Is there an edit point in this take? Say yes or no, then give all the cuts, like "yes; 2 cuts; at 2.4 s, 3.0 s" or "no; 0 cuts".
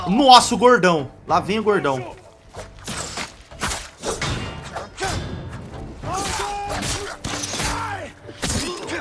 no; 0 cuts